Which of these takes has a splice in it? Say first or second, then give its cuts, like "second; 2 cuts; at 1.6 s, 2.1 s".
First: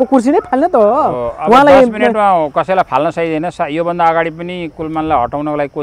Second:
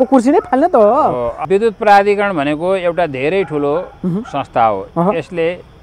second; 1 cut; at 1.3 s